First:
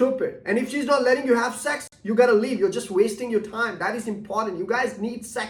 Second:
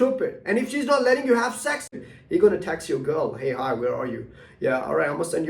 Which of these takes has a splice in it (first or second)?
second